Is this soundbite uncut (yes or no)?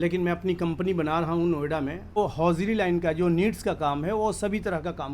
no